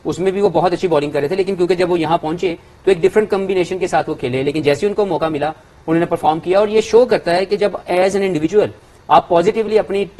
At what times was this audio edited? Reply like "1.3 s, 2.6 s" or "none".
none